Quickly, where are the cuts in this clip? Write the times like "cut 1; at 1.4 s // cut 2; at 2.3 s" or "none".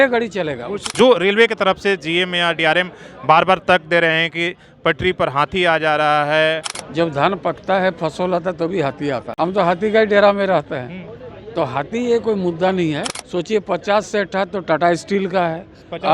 cut 1; at 0.9 s // cut 2; at 6.7 s // cut 3; at 9.3 s // cut 4; at 13.1 s